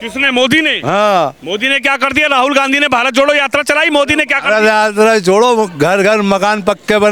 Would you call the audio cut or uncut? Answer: uncut